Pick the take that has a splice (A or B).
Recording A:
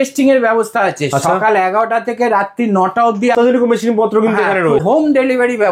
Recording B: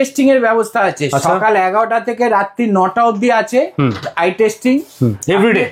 A